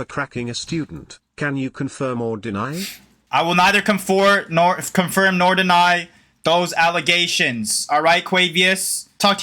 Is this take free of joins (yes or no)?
yes